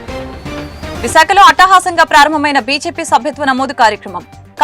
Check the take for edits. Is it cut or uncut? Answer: cut